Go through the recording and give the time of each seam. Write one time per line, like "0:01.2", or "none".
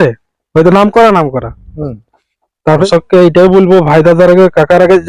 0:02.8